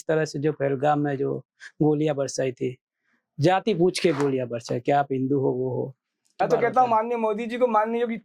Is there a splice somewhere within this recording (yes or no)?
yes